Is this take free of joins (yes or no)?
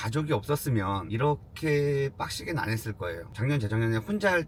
yes